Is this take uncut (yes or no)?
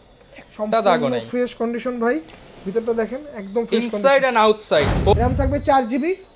no